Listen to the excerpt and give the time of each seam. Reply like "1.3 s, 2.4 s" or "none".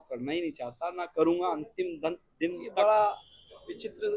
2.6 s